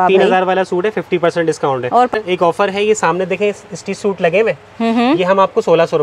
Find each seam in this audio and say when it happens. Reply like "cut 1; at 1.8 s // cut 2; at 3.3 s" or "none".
cut 1; at 2.1 s